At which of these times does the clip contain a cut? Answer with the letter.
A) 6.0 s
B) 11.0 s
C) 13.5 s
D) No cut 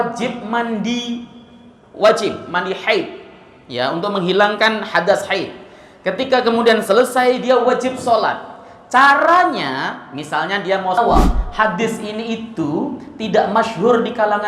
B